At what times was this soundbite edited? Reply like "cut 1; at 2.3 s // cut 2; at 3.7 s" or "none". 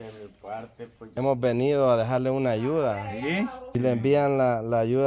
cut 1; at 1.0 s // cut 2; at 3.6 s